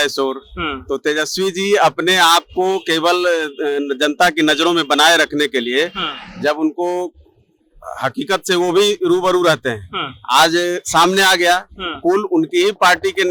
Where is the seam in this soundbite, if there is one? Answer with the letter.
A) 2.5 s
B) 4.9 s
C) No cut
C